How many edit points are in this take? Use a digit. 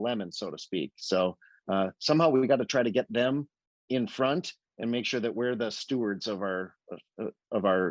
0